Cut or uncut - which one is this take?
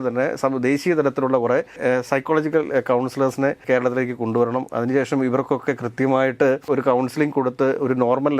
cut